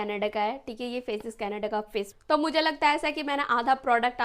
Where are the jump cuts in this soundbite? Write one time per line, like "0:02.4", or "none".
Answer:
0:02.3